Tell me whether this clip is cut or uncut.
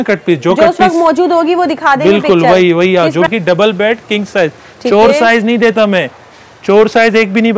cut